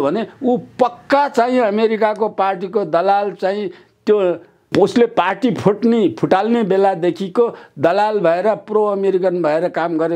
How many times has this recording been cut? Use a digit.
0